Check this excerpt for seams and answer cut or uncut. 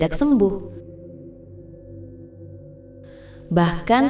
uncut